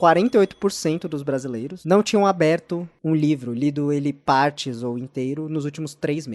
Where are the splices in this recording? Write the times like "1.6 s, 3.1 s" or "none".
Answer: 1.7 s

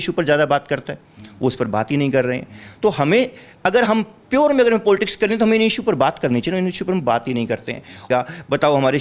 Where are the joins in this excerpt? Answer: 8.1 s

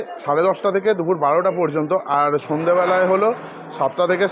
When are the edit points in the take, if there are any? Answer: none

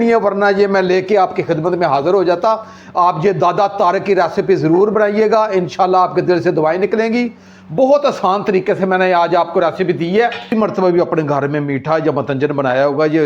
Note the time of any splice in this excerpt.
10.5 s

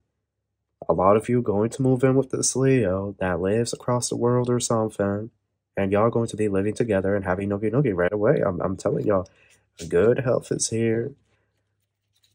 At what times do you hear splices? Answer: none

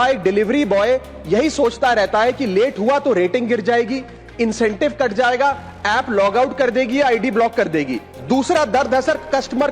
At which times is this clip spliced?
8.1 s

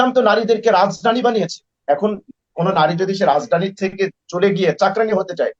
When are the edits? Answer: none

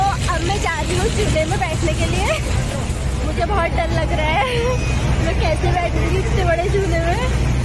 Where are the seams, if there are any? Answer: none

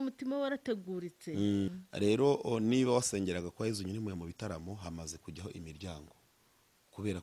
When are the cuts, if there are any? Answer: 1.7 s

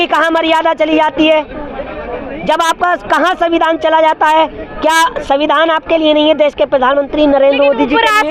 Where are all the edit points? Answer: none

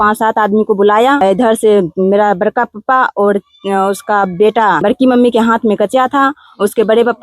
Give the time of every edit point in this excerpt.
1.2 s, 4.8 s

